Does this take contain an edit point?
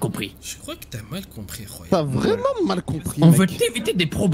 yes; 1 cut; at 1.8 s

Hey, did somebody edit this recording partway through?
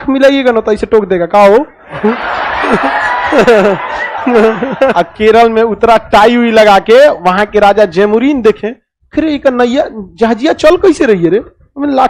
yes; 1 cut; at 4.9 s

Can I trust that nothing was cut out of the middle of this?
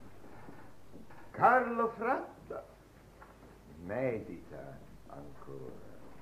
no; 1 cut; at 4.8 s

